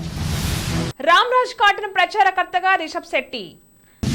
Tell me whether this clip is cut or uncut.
uncut